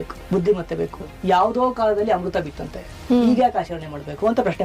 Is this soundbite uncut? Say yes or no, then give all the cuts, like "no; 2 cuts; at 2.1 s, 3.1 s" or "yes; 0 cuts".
no; 1 cut; at 1.0 s